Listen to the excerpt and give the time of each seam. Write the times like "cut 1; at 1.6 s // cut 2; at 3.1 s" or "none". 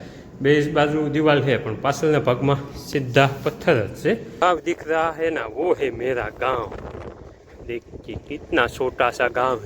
cut 1; at 4.4 s